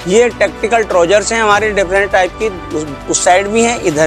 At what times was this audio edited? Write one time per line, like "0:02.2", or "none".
none